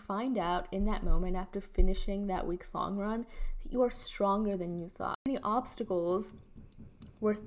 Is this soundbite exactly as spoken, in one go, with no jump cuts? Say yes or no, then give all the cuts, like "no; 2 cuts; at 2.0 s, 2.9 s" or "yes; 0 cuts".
no; 1 cut; at 5.3 s